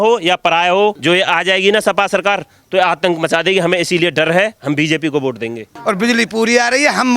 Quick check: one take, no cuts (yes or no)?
no